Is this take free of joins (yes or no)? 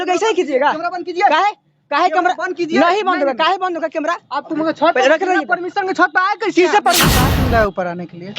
no